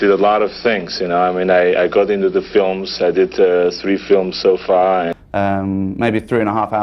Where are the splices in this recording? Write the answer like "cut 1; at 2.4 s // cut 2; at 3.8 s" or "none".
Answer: cut 1; at 5.2 s